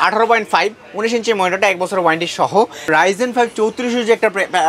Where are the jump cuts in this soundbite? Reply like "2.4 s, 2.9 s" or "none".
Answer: 2.9 s